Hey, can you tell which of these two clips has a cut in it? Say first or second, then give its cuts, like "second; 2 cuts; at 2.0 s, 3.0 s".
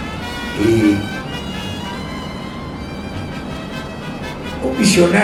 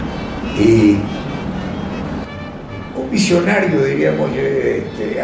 second; 1 cut; at 2.2 s